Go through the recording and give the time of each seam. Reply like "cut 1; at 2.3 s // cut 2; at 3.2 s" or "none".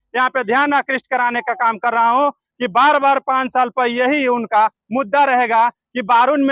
none